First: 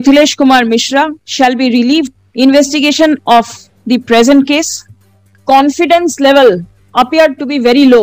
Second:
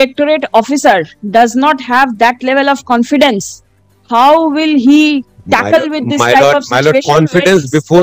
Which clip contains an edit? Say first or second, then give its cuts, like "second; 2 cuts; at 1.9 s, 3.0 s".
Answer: first; 3 cuts; at 1.2 s, 2.2 s, 5.3 s